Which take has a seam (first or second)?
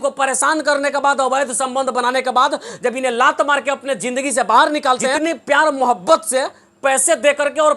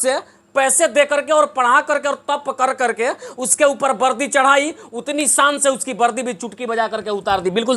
first